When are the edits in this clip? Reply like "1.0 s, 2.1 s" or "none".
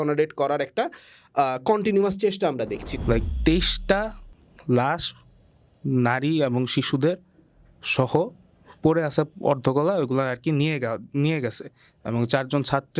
2.8 s